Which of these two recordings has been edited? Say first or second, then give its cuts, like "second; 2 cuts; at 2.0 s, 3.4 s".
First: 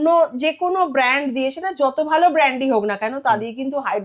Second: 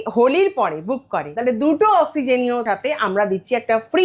second; 2 cuts; at 1.2 s, 2.6 s